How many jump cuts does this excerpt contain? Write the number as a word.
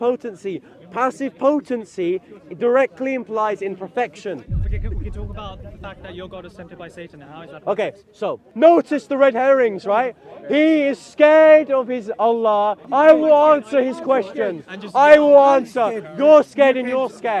two